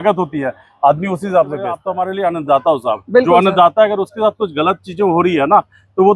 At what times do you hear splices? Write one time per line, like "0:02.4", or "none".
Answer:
0:01.9